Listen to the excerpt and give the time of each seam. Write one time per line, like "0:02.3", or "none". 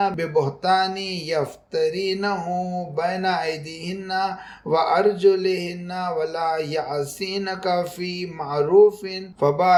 none